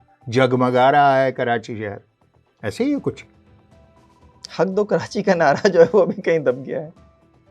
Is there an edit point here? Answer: no; 0 cuts

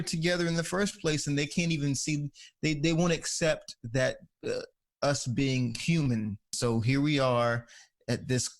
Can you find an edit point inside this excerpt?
yes; 1 cut; at 6.5 s

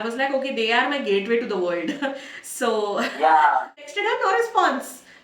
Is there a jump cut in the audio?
yes; 1 cut; at 3.9 s

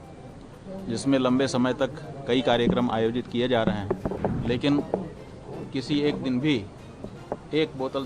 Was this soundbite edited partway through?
yes; 1 cut; at 4.2 s

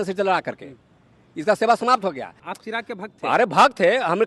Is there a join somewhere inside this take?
yes; 1 cut; at 2.4 s

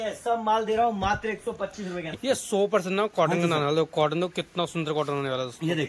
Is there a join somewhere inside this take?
yes; 1 cut; at 2.1 s

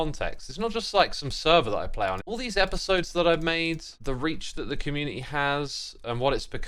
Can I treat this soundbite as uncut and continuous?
yes; 0 cuts

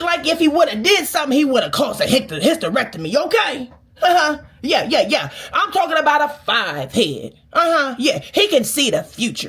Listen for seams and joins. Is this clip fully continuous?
yes; 0 cuts

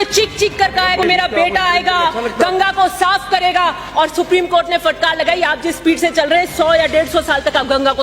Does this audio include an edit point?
yes; 1 cut; at 1.0 s

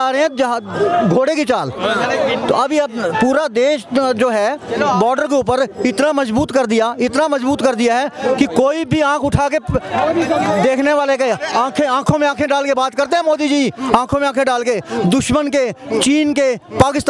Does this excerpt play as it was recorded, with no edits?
yes; 0 cuts

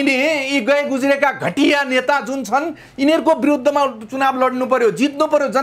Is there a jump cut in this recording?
no; 0 cuts

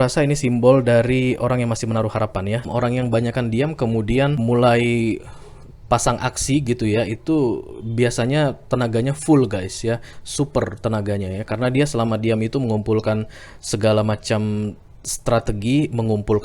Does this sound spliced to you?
yes; 2 cuts; at 2.6 s, 4.4 s

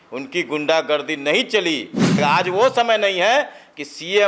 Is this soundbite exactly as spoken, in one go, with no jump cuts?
no; 1 cut; at 2.2 s

